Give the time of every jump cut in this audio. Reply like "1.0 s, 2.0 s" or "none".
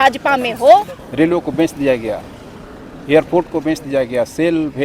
1.0 s